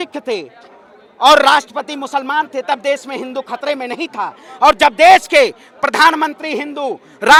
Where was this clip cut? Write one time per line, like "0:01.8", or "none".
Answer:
none